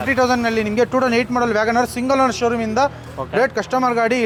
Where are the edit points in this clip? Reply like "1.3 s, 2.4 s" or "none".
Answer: none